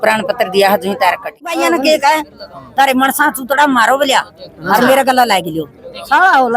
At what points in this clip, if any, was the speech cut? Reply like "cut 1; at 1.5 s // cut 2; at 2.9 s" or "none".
cut 1; at 1.4 s